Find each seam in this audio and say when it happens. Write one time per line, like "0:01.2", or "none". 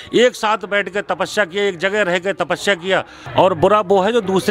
0:03.2

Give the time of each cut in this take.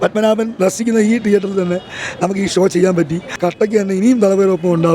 0:03.4

